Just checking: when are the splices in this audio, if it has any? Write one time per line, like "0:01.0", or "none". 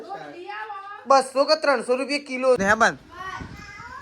0:02.6